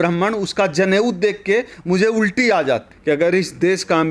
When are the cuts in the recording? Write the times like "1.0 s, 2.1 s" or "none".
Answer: 2.9 s